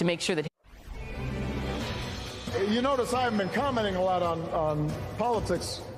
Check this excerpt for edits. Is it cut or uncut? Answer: cut